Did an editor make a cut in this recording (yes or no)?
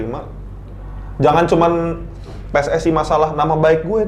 no